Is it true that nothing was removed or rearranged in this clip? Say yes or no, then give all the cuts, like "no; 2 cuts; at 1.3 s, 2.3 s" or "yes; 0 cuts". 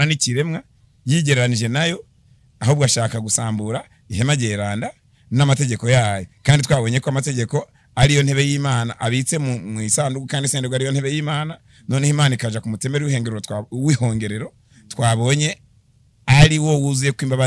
yes; 0 cuts